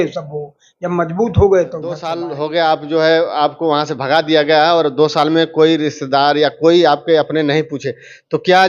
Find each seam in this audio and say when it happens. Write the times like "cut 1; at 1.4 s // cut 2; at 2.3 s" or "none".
cut 1; at 2.2 s